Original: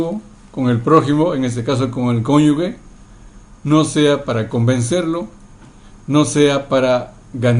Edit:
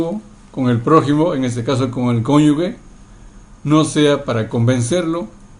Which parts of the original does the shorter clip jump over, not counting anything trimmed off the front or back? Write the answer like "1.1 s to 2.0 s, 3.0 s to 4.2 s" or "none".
none